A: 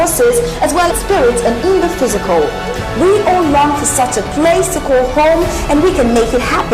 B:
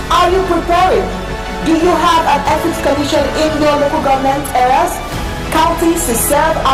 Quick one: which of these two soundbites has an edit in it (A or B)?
A